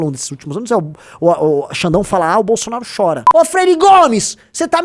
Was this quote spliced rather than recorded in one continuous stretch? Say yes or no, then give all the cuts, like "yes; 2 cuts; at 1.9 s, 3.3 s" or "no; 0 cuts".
yes; 1 cut; at 3.2 s